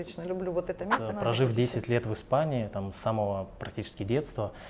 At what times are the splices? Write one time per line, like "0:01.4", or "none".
0:01.0

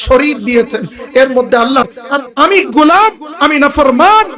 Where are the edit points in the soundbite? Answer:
0:01.9

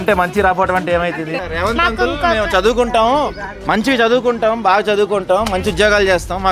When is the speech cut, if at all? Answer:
0:01.4

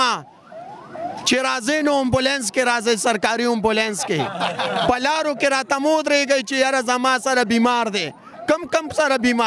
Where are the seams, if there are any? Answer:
none

